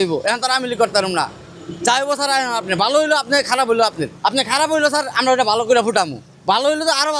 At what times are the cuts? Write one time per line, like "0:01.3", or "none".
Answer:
0:04.1